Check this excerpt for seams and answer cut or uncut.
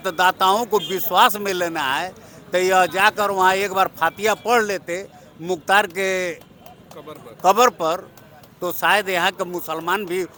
uncut